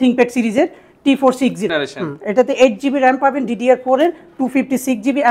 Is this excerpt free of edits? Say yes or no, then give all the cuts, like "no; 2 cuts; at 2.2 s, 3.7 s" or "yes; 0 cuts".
no; 1 cut; at 1.7 s